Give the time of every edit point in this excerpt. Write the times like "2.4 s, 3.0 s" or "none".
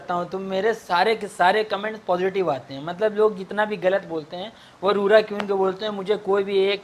none